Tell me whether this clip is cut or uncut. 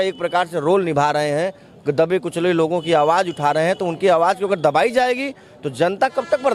uncut